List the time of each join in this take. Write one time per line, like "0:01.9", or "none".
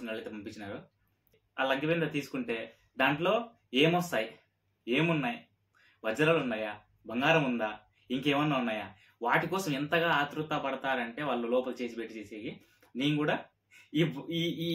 0:01.4